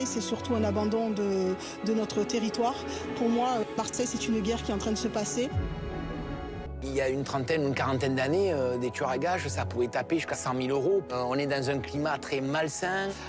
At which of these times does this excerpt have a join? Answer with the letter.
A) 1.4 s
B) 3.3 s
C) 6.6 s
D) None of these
C